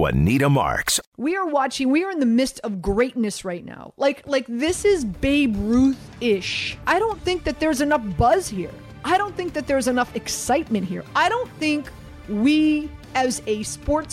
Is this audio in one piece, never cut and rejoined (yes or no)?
no